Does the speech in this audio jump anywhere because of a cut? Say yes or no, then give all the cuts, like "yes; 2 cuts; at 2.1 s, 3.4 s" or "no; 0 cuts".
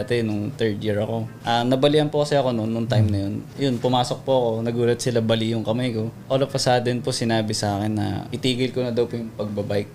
yes; 4 cuts; at 1.3 s, 3.4 s, 6.2 s, 8.3 s